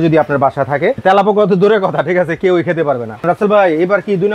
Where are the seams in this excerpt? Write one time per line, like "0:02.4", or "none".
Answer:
0:01.0
0:03.2